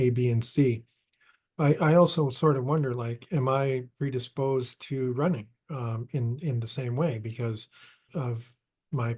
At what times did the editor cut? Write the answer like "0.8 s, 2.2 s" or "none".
8.0 s